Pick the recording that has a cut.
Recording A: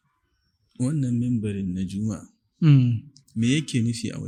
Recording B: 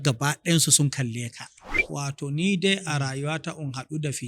B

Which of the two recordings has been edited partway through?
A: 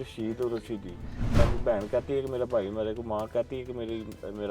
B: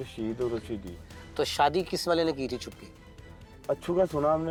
A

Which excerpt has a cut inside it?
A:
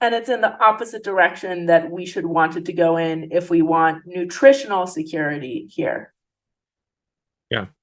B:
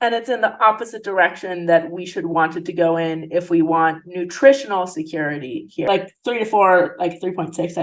B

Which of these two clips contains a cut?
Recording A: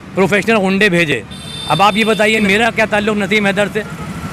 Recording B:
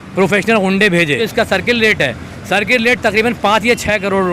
B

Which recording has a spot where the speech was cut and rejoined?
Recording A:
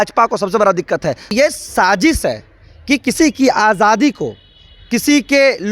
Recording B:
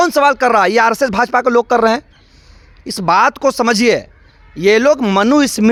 A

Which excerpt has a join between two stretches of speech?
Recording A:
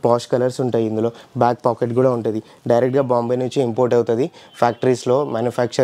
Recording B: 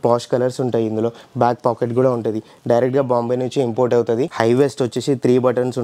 B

